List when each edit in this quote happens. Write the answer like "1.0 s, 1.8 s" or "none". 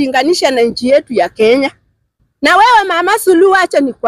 2.2 s